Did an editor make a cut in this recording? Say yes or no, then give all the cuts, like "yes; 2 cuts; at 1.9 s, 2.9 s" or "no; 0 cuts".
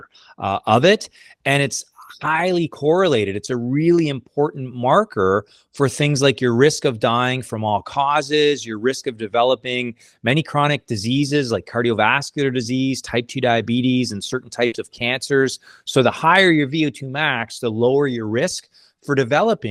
no; 0 cuts